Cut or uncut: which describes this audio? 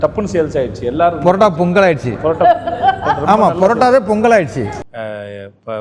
cut